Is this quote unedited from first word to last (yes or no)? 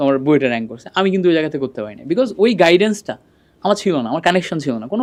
yes